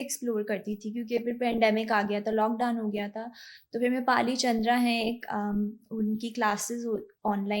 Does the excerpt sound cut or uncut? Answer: uncut